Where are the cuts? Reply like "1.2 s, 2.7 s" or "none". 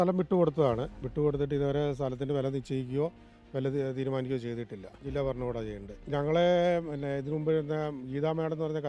1.0 s, 5.0 s, 5.9 s